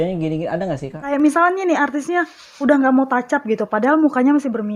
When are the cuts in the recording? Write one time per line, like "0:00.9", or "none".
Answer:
0:01.1